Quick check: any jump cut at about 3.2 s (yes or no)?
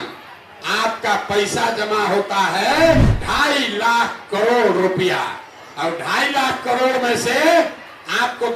yes